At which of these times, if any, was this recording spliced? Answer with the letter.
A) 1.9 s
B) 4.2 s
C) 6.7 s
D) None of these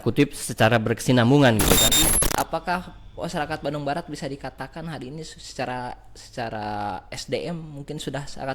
A